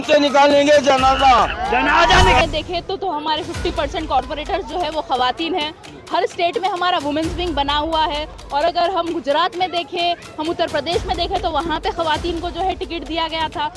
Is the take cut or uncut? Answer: cut